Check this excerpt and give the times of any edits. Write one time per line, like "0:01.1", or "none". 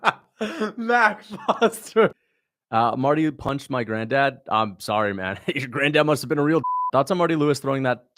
0:02.1
0:06.7